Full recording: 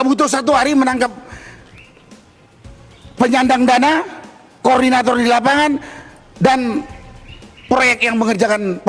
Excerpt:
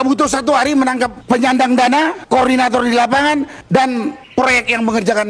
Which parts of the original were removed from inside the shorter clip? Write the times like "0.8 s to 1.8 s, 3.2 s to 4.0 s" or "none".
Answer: 1.2 s to 3.1 s, 4.1 s to 4.5 s, 5.9 s to 6.3 s, 6.9 s to 7.6 s